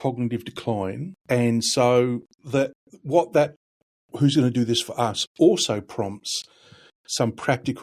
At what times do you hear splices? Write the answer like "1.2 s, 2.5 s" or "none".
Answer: 1.1 s, 2.3 s